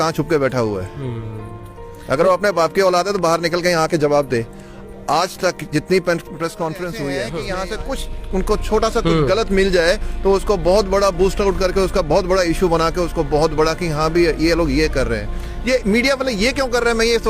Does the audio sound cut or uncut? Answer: cut